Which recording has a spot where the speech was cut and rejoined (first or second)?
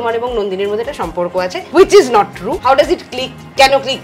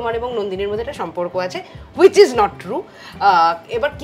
first